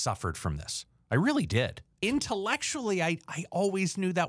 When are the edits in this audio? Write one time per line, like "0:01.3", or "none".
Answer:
0:02.0